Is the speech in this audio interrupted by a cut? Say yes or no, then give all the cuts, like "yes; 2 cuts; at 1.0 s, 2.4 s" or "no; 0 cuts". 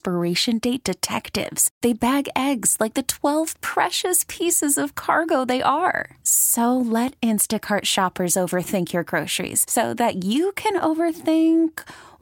no; 0 cuts